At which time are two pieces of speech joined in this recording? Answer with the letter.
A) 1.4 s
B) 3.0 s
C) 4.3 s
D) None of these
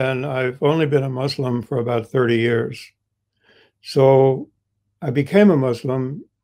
D